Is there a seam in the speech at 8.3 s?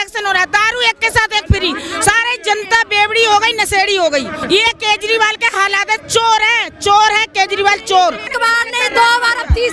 yes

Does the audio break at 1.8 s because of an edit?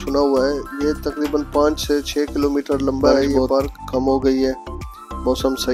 no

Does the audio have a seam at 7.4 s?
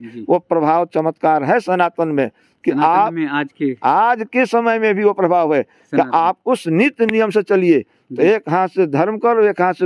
no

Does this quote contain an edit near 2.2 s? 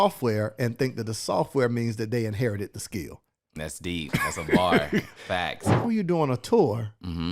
no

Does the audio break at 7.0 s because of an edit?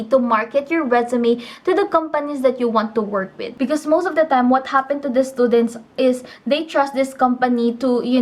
no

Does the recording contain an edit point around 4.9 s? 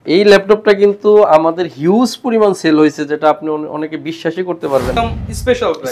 yes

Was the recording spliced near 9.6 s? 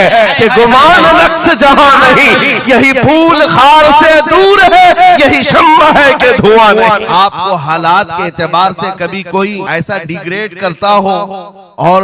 yes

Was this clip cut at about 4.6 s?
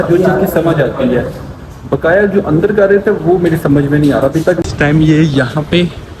yes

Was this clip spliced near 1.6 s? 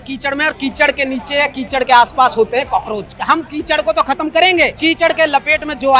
no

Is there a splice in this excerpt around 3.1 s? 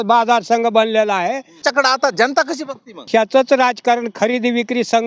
yes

